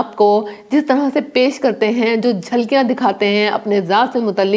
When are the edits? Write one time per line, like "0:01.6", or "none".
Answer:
none